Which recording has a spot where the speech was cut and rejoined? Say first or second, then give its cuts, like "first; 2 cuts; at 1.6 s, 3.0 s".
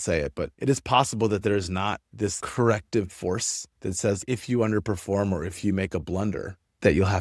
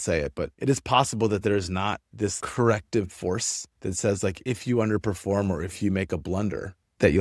first; 1 cut; at 4.2 s